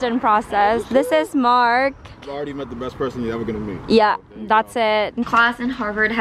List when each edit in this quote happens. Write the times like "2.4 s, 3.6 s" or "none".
2.3 s, 5.3 s